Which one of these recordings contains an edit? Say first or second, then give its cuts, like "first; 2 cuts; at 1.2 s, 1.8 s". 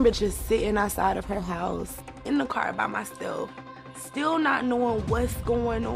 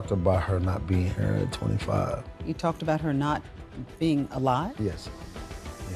first; 1 cut; at 2.0 s